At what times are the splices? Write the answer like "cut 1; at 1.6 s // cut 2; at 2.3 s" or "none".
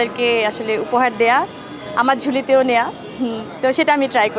none